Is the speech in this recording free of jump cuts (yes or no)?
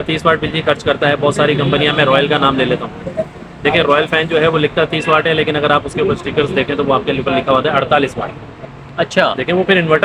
yes